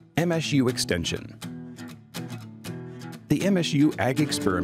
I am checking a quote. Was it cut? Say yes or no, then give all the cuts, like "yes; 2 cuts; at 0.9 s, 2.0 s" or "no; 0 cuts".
no; 0 cuts